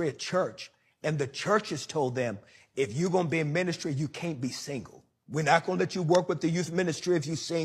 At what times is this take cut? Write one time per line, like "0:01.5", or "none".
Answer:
0:05.5
0:06.6